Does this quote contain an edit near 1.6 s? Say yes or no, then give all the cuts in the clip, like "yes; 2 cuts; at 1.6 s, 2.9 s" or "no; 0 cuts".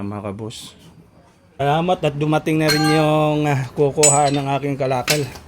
yes; 1 cut; at 1.6 s